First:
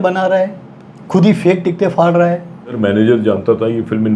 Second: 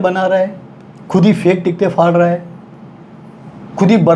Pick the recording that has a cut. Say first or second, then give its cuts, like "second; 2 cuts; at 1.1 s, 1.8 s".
first; 1 cut; at 2.8 s